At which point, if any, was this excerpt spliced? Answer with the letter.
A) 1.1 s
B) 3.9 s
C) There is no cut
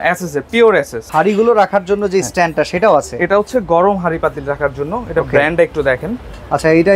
A